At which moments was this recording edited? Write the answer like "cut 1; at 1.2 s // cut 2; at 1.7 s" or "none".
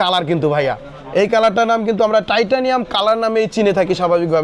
none